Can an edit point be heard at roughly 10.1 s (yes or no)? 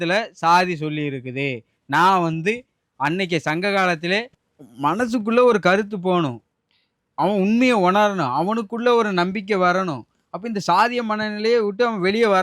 no